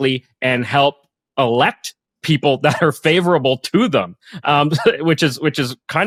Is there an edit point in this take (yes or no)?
no